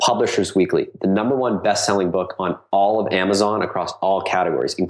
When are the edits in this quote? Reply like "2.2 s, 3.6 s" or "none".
none